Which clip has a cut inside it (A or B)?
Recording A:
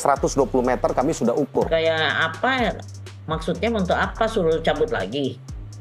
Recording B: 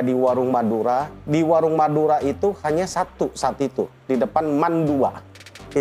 A